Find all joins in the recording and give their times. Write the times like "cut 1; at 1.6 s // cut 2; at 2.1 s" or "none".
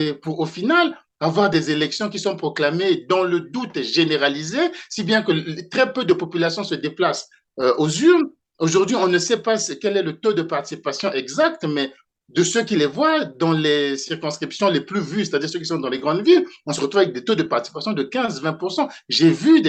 none